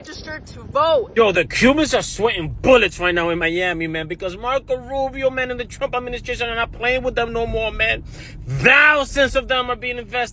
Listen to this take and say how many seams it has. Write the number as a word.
one